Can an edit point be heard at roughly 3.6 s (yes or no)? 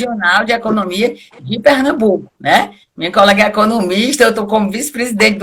no